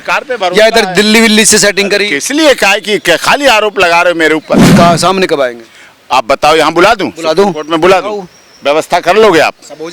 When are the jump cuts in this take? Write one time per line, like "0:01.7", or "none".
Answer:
0:04.7